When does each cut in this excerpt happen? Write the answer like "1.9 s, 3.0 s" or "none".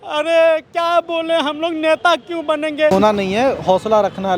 2.9 s